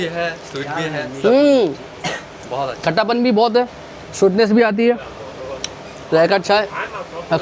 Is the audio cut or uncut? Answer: uncut